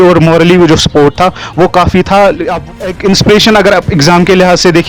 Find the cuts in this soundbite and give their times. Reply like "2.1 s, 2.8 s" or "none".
2.7 s